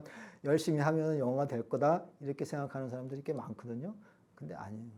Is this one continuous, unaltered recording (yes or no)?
yes